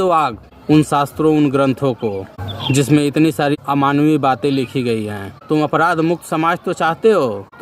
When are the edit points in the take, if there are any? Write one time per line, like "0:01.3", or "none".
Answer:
0:03.5
0:05.3